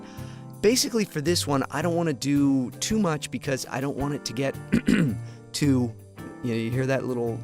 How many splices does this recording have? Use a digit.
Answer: 1